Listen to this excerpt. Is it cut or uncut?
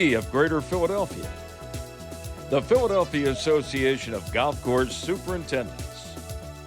uncut